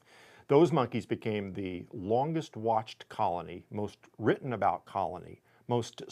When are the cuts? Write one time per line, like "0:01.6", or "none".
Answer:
none